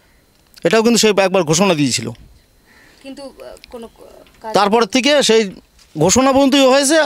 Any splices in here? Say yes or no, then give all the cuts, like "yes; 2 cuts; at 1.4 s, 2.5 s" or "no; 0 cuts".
no; 0 cuts